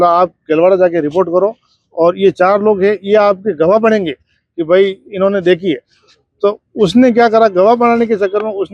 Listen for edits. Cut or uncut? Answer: uncut